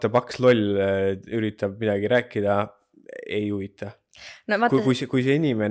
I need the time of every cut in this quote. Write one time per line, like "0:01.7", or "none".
none